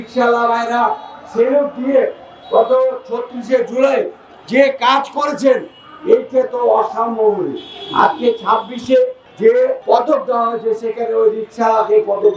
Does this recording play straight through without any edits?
no; 1 cut; at 9.6 s

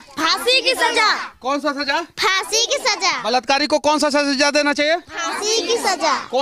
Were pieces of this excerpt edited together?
no; 0 cuts

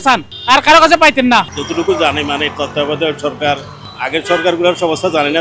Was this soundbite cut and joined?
no; 0 cuts

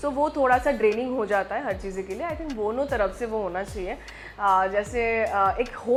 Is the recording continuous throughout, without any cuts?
yes; 0 cuts

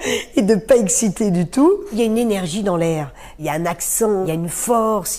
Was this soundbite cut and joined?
yes; 3 cuts; at 2.0 s, 3.4 s, 4.2 s

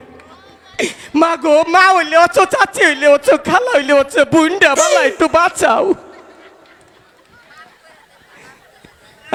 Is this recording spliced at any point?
no; 0 cuts

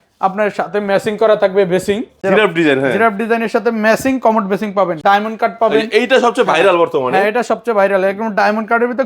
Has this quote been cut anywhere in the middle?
yes; 2 cuts; at 2.1 s, 5.0 s

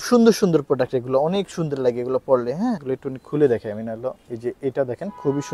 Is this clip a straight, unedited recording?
no; 1 cut; at 2.8 s

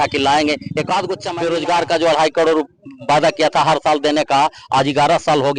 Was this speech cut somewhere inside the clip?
yes; 1 cut; at 1.2 s

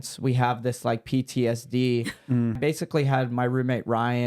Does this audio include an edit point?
yes; 1 cut; at 2.5 s

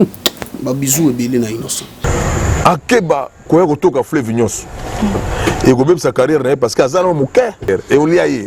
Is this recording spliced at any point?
yes; 1 cut; at 2.0 s

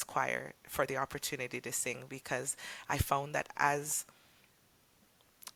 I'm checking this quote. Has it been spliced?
no; 0 cuts

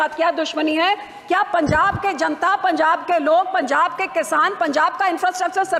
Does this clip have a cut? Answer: no; 0 cuts

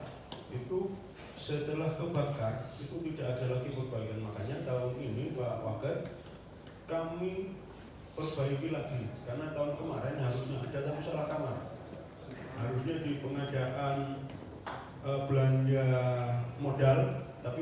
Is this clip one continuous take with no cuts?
yes; 0 cuts

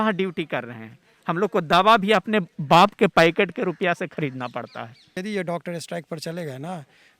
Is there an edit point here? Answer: yes; 1 cut; at 5.2 s

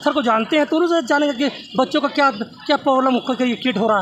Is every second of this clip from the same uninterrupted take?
yes; 0 cuts

